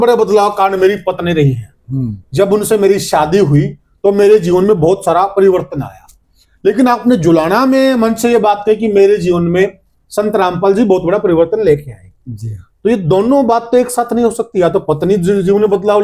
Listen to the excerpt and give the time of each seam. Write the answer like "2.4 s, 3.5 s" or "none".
none